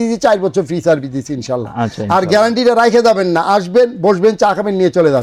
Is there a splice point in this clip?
no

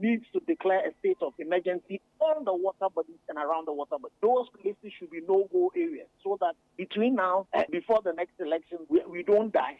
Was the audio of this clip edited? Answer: yes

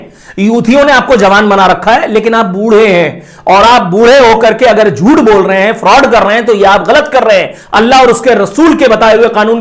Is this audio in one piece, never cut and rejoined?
yes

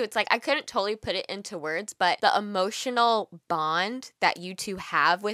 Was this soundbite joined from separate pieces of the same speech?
yes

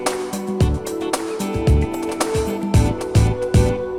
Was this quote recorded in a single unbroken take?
yes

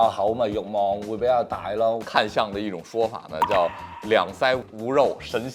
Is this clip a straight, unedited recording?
no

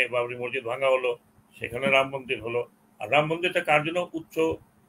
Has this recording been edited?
no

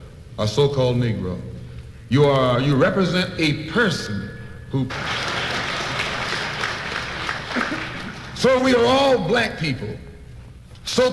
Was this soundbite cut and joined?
no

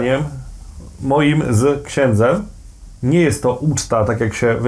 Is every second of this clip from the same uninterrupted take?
yes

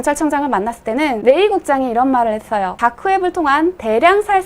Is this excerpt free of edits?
no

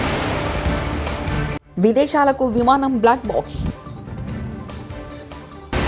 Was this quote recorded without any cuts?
no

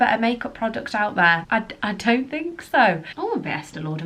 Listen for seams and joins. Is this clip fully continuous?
no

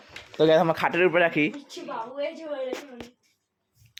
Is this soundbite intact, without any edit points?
yes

